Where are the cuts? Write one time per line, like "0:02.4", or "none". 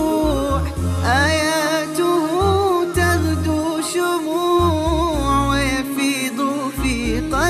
none